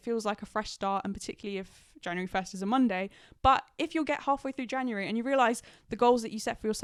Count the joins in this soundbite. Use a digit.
0